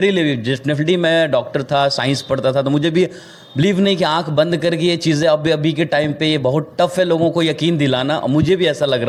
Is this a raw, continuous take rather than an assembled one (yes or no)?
yes